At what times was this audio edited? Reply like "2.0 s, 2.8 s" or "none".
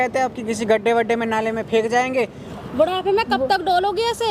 2.4 s